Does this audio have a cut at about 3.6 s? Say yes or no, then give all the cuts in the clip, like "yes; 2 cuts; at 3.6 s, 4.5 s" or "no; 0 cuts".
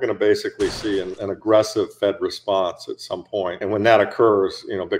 yes; 2 cuts; at 1.1 s, 3.6 s